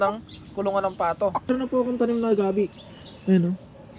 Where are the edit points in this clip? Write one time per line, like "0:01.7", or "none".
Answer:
0:01.5